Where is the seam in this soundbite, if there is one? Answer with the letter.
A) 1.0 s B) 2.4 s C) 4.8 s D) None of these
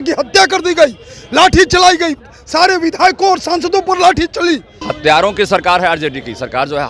C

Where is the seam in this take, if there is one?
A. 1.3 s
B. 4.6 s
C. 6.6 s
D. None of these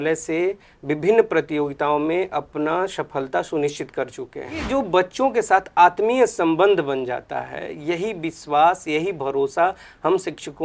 B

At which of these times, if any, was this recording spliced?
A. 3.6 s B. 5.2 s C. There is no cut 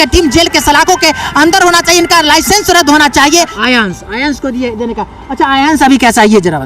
A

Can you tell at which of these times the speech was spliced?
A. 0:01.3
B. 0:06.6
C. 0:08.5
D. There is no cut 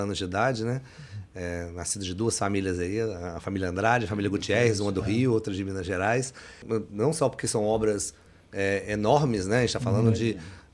B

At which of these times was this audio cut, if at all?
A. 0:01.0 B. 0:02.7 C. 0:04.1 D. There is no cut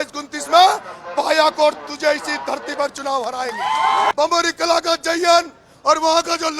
C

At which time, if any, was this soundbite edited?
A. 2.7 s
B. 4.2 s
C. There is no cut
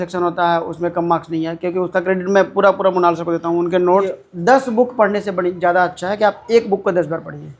B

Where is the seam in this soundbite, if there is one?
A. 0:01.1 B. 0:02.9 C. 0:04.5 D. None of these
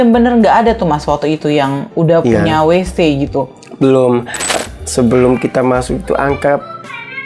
C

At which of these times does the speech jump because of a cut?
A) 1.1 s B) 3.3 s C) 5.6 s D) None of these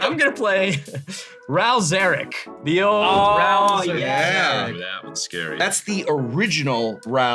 C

